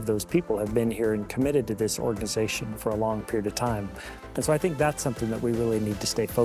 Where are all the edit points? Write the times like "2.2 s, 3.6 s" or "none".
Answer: none